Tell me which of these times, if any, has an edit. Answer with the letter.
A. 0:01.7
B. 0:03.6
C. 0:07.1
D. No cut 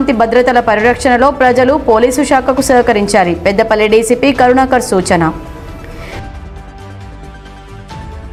D